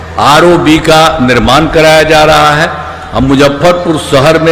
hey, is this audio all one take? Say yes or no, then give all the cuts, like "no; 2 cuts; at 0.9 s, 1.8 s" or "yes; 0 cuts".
yes; 0 cuts